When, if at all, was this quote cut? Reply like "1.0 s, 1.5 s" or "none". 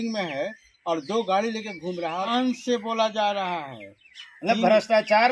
2.3 s

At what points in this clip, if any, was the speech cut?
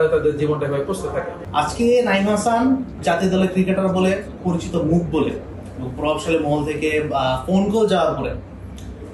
1.4 s, 3.0 s, 4.4 s

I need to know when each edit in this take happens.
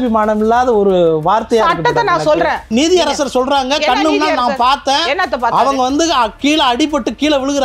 2.7 s

